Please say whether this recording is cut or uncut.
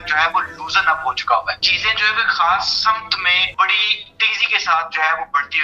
cut